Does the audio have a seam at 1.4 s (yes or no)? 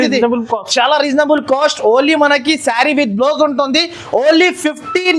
no